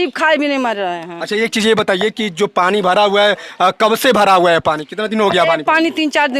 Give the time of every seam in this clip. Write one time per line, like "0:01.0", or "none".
none